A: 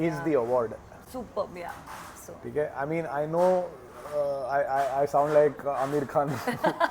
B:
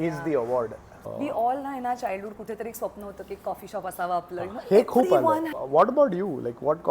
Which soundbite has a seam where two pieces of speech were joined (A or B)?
B